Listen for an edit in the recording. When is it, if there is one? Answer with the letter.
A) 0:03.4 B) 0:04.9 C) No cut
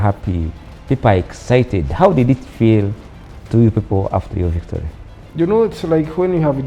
C